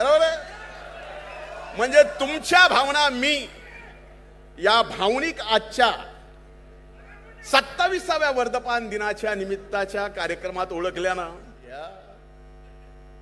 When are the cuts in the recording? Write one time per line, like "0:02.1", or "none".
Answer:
0:11.6